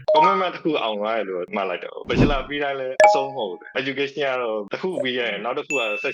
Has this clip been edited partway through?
yes; 1 cut; at 2.0 s

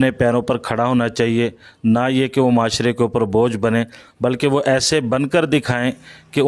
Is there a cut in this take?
no; 0 cuts

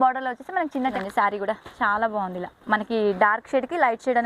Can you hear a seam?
yes; 1 cut; at 1.0 s

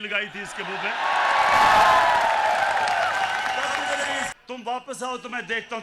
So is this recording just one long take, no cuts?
no; 1 cut; at 4.3 s

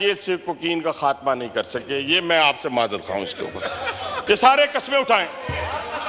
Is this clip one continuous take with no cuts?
no; 1 cut; at 4.2 s

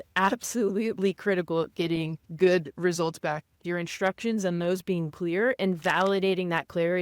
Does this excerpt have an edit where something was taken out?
yes; 2 cuts; at 2.2 s, 3.6 s

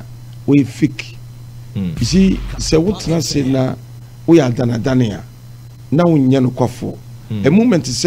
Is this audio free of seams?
yes; 0 cuts

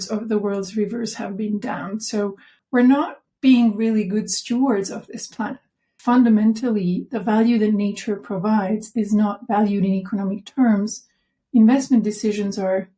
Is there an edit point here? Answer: yes; 2 cuts; at 2.5 s, 5.9 s

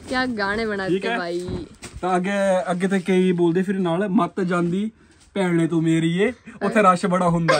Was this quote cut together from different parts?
no; 0 cuts

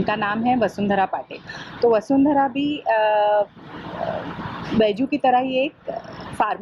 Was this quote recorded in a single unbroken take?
yes; 0 cuts

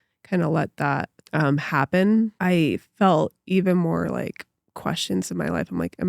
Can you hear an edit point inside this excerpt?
yes; 2 cuts; at 1.2 s, 2.3 s

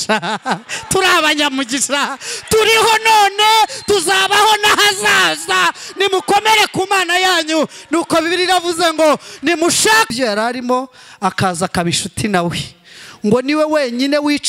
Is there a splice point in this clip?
yes; 1 cut; at 10.1 s

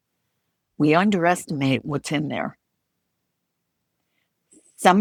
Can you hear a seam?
no; 0 cuts

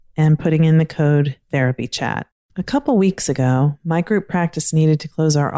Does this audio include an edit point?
yes; 1 cut; at 2.4 s

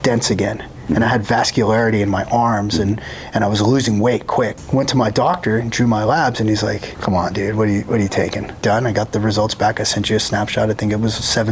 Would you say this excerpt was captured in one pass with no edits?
no; 3 cuts; at 4.6 s, 6.9 s, 8.6 s

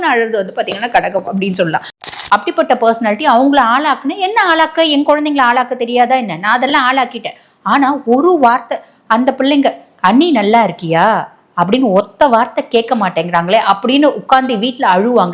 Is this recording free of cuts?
no; 1 cut; at 2.0 s

